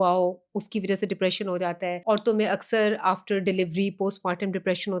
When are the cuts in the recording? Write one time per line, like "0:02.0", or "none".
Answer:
0:02.0